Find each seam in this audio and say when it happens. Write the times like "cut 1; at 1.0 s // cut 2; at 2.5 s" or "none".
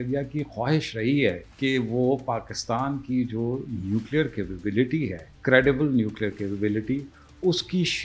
cut 1; at 1.5 s // cut 2; at 5.3 s